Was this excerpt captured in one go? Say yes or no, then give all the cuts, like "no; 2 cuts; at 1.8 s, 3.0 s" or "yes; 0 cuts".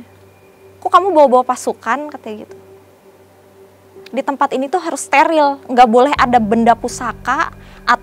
yes; 0 cuts